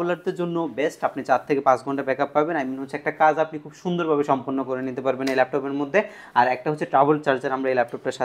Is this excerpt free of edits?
yes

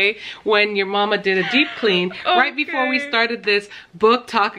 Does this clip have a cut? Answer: no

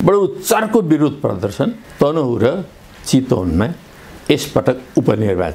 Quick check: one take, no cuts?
yes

